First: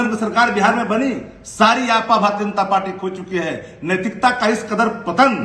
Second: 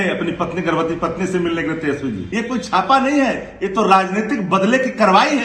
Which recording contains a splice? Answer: second; 1 cut; at 2.2 s

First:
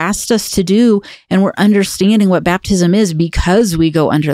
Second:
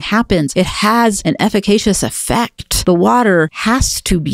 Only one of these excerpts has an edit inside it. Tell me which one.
second; 3 cuts; at 0.9 s, 2.6 s, 3.6 s

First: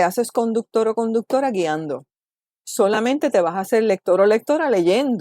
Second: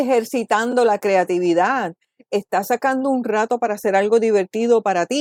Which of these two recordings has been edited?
first; 1 cut; at 2.1 s

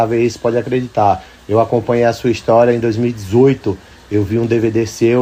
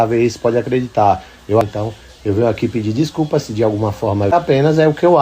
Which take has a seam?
second; 2 cuts; at 1.6 s, 4.3 s

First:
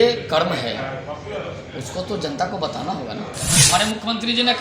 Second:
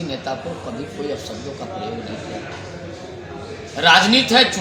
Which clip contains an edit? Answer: first; 1 cut; at 3.7 s

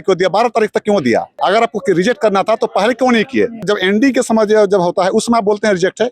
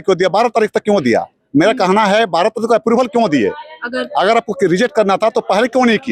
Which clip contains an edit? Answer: first; 2 cuts; at 1.3 s, 3.7 s

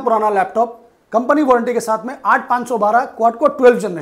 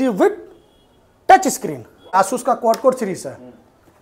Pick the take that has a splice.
second; 1 cut; at 2.1 s

